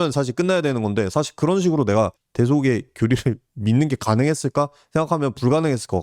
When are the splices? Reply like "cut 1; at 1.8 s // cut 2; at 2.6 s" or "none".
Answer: cut 1; at 2.2 s